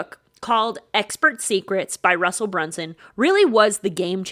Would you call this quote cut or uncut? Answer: uncut